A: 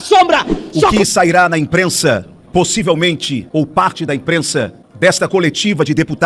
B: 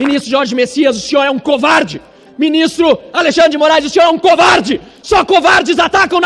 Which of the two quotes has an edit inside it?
A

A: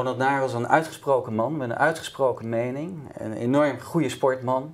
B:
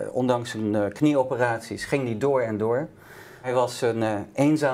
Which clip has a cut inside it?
B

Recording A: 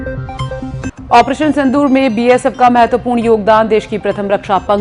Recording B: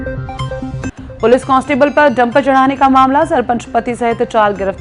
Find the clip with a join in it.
A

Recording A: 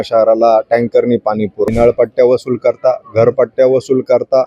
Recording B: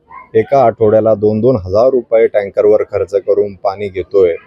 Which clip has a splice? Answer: A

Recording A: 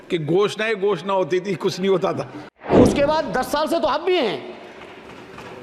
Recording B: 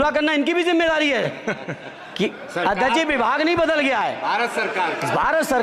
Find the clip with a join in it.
A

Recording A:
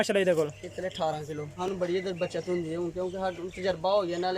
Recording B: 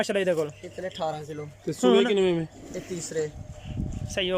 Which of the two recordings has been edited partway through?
A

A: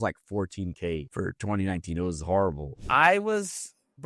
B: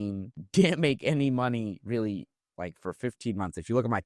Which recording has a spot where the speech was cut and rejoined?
A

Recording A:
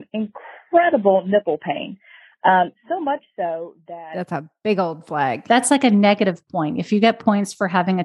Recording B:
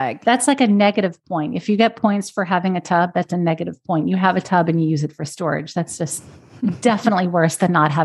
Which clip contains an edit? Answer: A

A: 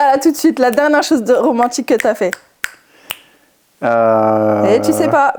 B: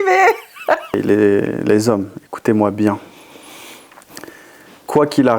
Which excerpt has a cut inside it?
B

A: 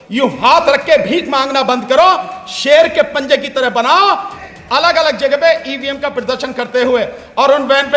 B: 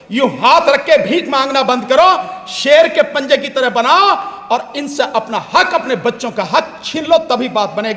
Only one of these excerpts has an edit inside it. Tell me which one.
A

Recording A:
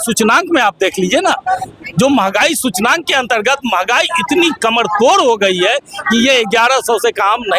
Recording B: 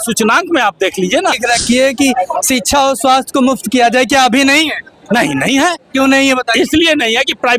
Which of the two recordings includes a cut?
B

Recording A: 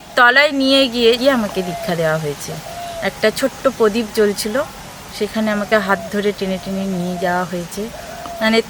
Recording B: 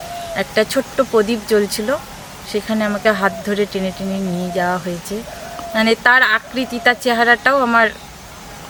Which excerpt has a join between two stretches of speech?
A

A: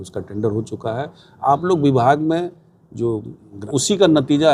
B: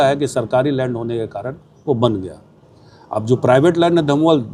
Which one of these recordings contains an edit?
A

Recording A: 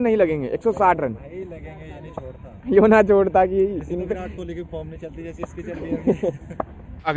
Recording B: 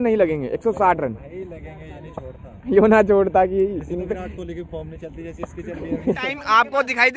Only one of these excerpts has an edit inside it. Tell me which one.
B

